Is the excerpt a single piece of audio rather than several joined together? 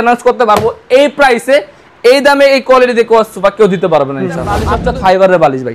no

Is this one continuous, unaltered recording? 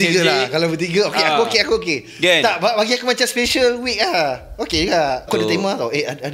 no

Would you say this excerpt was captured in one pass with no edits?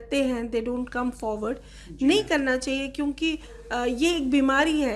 yes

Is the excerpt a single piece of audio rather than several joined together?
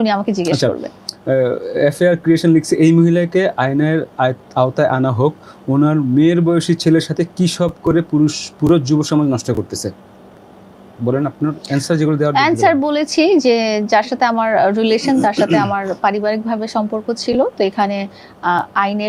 yes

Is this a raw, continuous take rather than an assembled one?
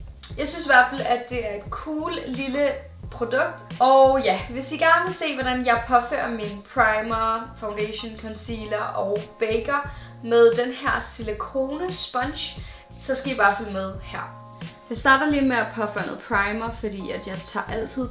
no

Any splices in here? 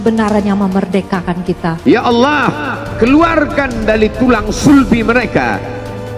yes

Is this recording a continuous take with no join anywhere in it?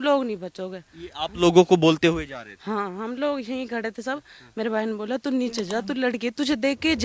yes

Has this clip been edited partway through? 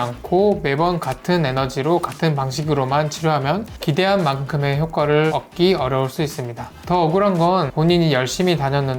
no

